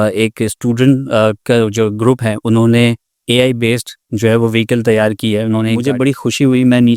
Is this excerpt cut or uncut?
cut